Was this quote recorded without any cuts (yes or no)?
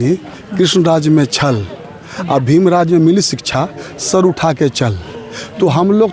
yes